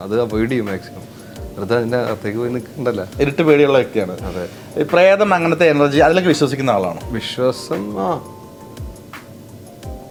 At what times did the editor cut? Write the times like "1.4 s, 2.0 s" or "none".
none